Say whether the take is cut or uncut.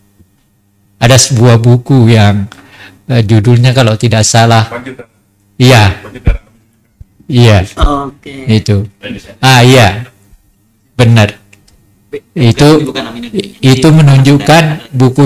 uncut